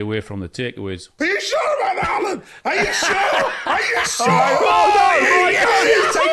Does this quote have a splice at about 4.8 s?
no; 1 cut; at 1.1 s

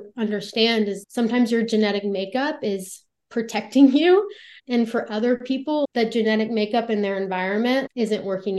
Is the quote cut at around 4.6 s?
yes; 1 cut; at 4.6 s

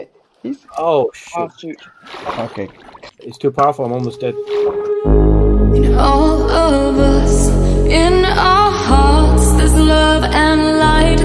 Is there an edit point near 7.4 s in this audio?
no; 2 cuts; at 2.9 s, 4.4 s

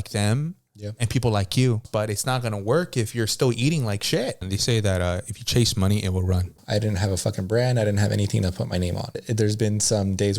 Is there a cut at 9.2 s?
yes; 4 cuts; at 1.8 s, 4.5 s, 6.6 s, 9.2 s

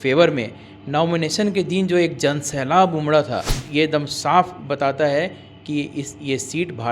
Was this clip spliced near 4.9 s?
no; 1 cut; at 3.5 s

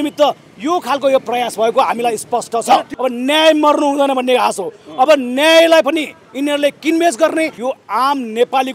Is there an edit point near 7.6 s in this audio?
yes; 2 cuts; at 2.9 s, 7.6 s

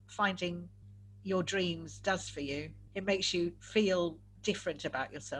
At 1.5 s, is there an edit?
no; 2 cuts; at 2.8 s, 3.6 s

